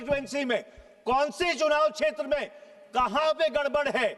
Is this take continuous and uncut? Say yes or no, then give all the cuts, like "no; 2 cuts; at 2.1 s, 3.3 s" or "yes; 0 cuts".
yes; 0 cuts